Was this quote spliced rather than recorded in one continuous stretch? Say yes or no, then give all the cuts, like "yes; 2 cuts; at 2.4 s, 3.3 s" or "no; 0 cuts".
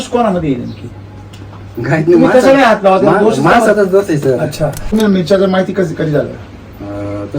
yes; 2 cuts; at 1.7 s, 4.9 s